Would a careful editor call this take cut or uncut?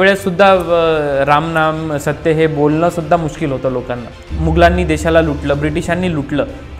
cut